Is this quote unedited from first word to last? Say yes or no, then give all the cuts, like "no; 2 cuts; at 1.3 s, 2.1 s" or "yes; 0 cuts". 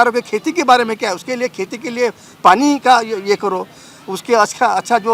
yes; 0 cuts